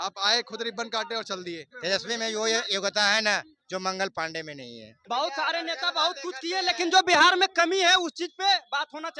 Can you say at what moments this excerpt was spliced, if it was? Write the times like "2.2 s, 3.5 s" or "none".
1.7 s, 4.9 s